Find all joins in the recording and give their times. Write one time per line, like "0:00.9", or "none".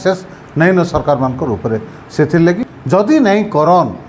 0:02.7